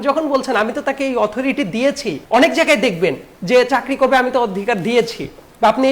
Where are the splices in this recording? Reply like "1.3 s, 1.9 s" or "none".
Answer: 2.1 s, 3.3 s

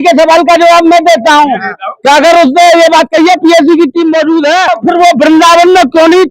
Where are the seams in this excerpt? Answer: 4.8 s

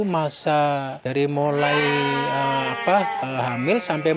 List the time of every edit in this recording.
1.0 s

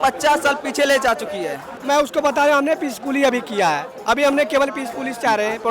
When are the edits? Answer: 1.8 s

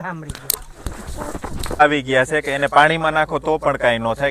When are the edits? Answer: 1.8 s

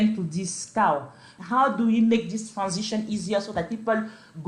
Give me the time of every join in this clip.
1.3 s

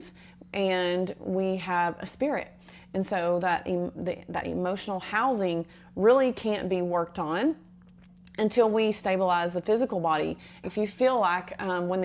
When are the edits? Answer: 10.6 s

